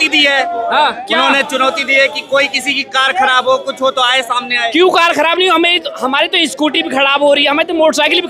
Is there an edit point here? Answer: no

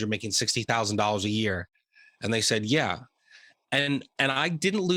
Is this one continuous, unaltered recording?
yes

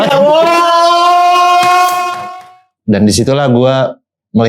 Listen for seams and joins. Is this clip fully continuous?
no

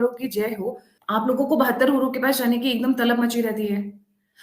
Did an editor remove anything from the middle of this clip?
yes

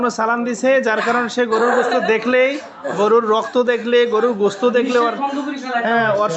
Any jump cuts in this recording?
no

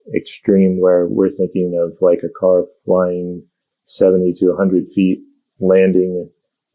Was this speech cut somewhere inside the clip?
no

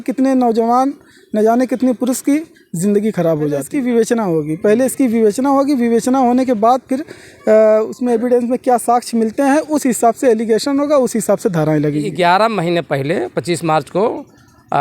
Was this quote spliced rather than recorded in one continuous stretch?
yes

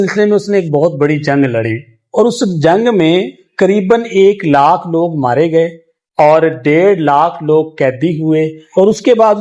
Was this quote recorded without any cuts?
yes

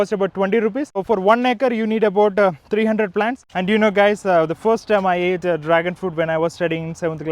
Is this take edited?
yes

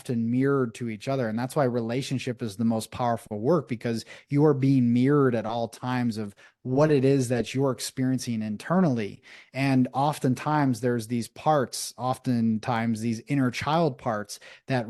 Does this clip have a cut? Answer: no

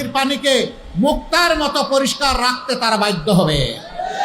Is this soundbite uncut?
yes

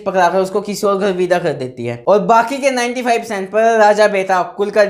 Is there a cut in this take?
no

